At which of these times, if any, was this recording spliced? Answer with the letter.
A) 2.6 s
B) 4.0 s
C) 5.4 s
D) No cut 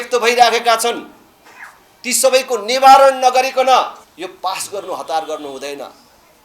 B